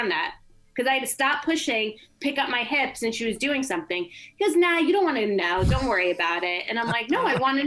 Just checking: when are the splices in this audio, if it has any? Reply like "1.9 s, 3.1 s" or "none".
none